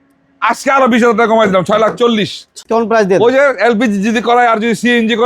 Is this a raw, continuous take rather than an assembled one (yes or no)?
no